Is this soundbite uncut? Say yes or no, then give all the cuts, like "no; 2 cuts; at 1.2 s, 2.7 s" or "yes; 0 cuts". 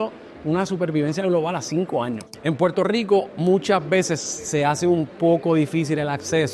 no; 1 cut; at 2.2 s